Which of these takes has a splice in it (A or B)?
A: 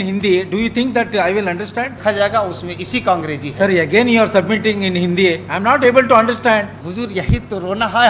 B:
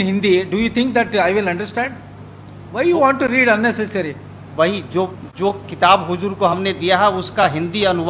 A